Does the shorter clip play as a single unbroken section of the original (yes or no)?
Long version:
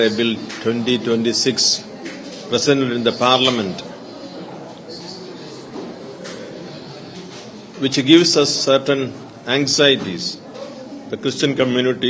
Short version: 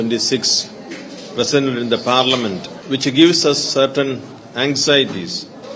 no